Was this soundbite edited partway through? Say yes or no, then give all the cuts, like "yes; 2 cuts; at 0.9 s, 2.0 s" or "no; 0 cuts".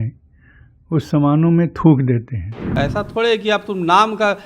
yes; 1 cut; at 2.7 s